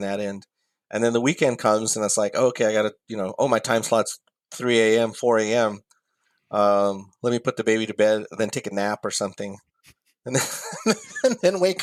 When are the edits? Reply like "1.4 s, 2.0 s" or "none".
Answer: none